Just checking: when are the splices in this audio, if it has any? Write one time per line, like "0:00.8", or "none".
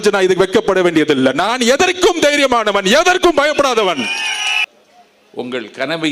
0:04.6